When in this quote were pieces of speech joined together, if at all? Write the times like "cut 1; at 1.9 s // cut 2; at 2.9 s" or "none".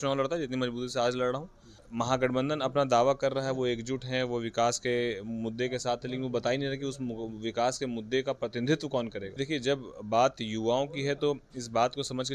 cut 1; at 1.8 s // cut 2; at 9.4 s